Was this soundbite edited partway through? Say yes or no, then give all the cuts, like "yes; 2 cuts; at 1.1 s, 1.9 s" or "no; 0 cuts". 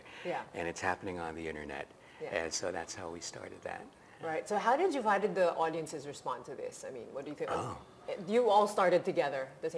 no; 0 cuts